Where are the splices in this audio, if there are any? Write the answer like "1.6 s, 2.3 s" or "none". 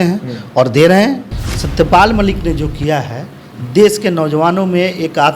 1.2 s